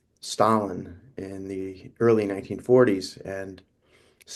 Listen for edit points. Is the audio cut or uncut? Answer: uncut